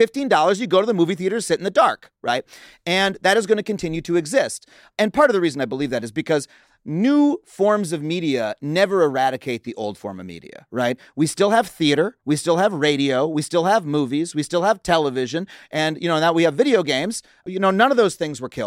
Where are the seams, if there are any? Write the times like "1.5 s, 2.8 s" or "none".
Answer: 5.0 s, 17.4 s